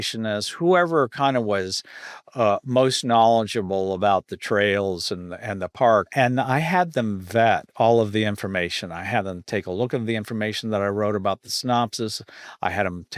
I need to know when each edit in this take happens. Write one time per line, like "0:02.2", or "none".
0:06.1